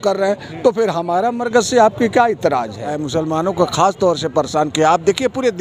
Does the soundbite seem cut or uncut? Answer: cut